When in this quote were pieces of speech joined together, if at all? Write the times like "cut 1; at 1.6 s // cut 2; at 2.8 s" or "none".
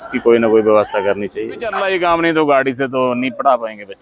cut 1; at 1.8 s